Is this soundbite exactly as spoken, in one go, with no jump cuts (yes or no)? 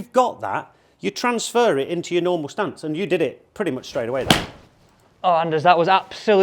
no